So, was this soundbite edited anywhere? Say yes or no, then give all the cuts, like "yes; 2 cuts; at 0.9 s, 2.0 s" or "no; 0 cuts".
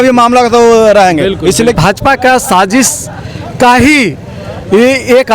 yes; 1 cut; at 1.7 s